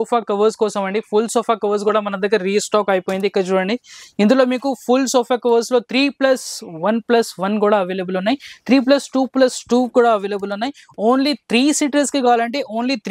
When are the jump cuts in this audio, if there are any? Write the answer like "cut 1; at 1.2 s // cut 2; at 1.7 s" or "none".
none